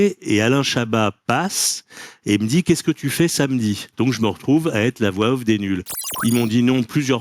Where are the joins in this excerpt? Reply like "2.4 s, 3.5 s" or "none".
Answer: 3.9 s, 6.0 s